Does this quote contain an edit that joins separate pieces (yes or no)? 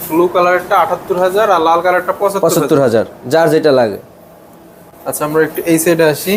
no